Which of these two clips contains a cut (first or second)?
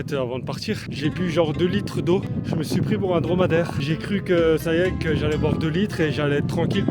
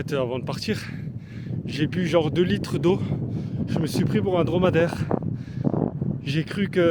first